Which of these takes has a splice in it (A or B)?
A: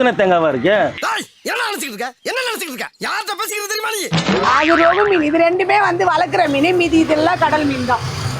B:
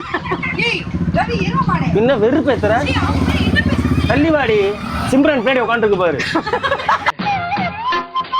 A